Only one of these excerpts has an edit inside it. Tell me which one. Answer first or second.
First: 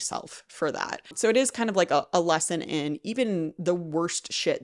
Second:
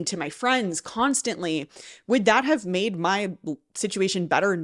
first